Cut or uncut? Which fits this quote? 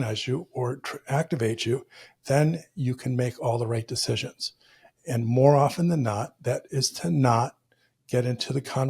cut